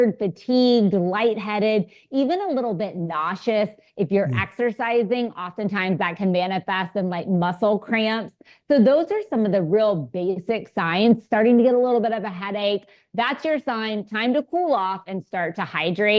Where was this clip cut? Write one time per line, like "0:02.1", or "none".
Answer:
none